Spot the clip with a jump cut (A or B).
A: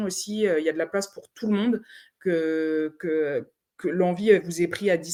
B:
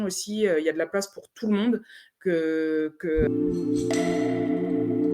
B